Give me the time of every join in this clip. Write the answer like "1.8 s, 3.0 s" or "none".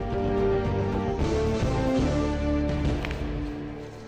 1.8 s